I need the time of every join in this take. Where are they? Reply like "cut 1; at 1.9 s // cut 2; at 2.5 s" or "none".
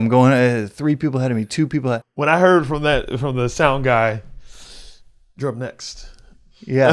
cut 1; at 2.0 s